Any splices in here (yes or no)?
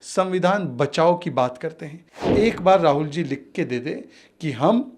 yes